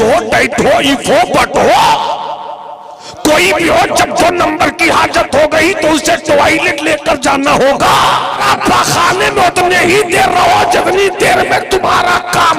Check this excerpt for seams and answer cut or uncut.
cut